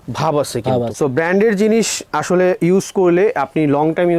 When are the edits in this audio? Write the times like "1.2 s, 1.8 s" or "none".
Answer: 0.9 s

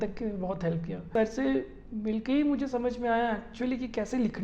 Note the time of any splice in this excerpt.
1.1 s

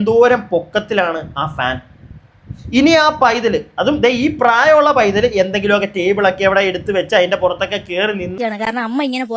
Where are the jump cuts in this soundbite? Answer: 8.3 s

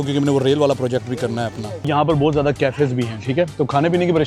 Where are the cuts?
none

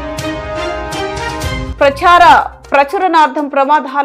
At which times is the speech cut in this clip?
none

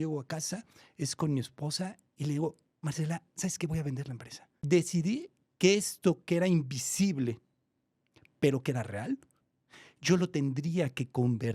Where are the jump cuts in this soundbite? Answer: 4.5 s

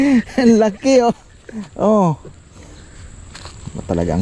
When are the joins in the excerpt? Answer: none

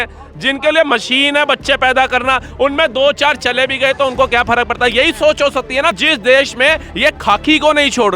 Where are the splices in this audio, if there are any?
5.9 s

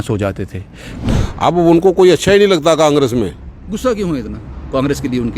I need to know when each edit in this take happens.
1.0 s

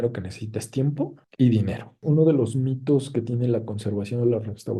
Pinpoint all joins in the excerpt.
2.0 s

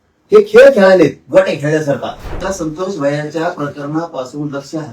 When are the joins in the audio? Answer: 2.4 s

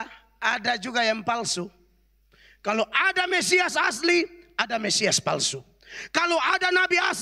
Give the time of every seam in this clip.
none

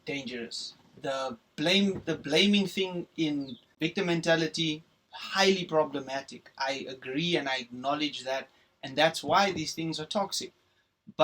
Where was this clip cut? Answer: 3.7 s

